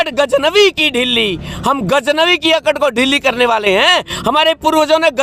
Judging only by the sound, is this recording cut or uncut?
uncut